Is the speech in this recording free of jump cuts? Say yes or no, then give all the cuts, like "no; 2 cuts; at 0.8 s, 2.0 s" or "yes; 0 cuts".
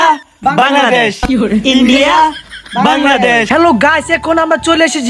no; 1 cut; at 3.5 s